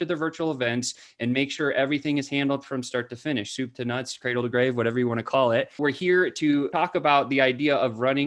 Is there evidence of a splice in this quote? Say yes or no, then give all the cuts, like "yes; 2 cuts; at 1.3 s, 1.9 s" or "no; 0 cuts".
yes; 2 cuts; at 5.8 s, 6.7 s